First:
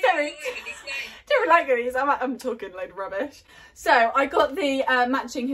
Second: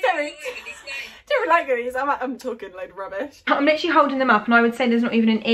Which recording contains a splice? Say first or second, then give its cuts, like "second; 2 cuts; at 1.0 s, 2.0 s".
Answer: second; 1 cut; at 3.5 s